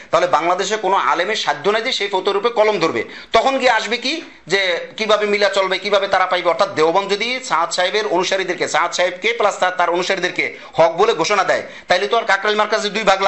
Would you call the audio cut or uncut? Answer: uncut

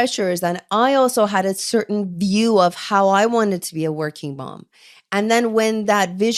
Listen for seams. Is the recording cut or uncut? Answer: uncut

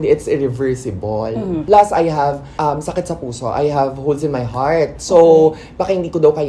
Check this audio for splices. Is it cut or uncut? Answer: cut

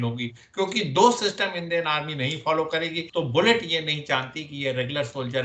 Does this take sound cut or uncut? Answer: cut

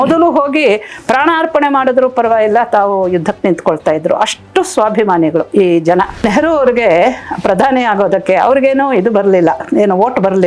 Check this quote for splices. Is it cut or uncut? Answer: cut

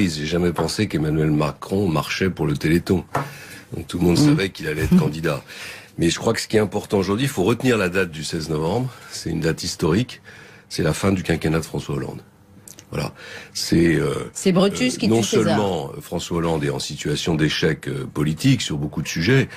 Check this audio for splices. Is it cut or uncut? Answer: cut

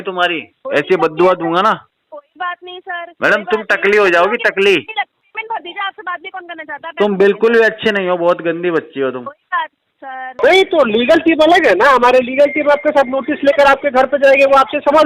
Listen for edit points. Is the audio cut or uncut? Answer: cut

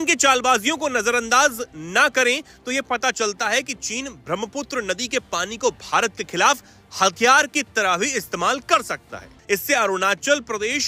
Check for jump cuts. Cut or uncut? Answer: uncut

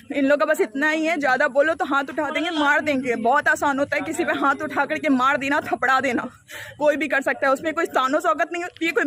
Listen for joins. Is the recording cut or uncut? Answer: uncut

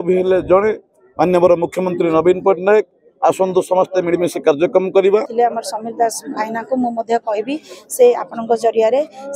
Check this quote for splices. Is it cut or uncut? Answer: cut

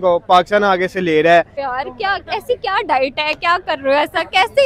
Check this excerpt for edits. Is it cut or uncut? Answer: cut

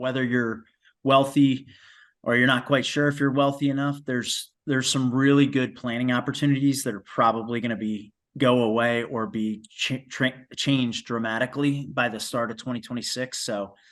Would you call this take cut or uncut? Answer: uncut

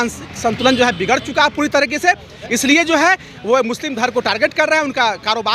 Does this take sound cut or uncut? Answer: uncut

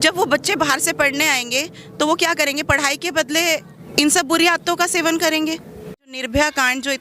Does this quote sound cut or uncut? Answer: cut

